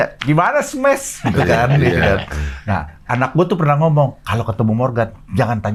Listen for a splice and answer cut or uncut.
uncut